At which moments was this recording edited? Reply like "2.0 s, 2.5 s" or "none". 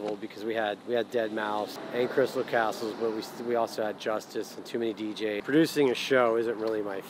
1.8 s, 5.4 s